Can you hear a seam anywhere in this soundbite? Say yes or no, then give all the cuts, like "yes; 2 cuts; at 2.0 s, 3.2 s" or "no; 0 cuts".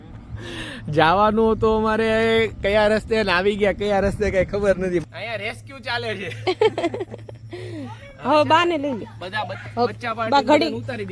yes; 1 cut; at 5.0 s